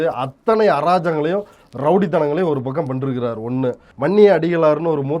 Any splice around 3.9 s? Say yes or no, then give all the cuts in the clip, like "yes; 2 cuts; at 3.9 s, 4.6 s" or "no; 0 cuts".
yes; 1 cut; at 3.9 s